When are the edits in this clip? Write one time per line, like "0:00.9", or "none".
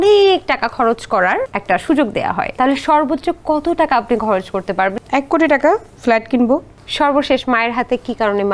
0:01.5
0:02.5
0:05.0
0:05.9
0:06.8